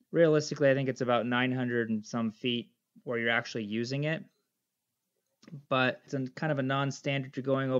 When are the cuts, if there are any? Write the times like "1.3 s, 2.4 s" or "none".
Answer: 6.0 s